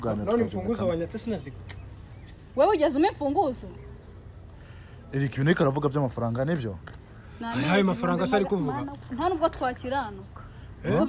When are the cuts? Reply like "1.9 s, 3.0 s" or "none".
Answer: none